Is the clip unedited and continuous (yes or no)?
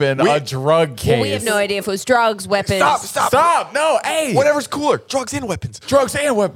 yes